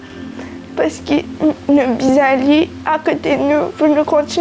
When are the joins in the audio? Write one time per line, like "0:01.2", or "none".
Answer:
none